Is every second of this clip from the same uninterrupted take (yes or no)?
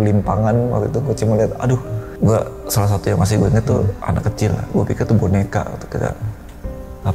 no